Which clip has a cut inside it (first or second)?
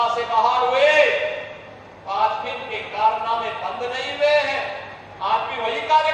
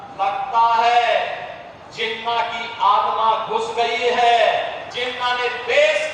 second